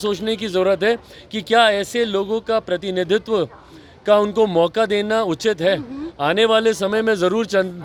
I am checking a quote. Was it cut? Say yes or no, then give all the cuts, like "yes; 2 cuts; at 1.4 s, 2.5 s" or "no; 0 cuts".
no; 0 cuts